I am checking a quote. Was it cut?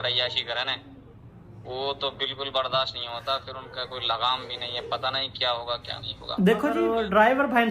yes; 1 cut; at 6.8 s

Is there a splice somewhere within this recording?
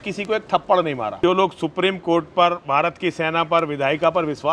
yes; 1 cut; at 1.2 s

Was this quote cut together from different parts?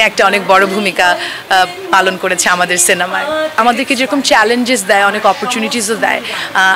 yes; 1 cut; at 3.6 s

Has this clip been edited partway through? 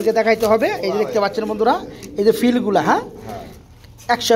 no; 0 cuts

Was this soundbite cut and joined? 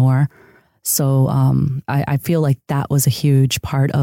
yes; 1 cut; at 1.8 s

